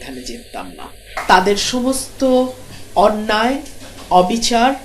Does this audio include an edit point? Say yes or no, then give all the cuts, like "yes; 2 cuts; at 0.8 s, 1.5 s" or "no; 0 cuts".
yes; 1 cut; at 1.1 s